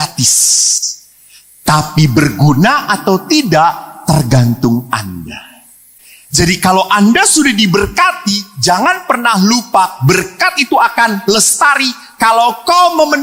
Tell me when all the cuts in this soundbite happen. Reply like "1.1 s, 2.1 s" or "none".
none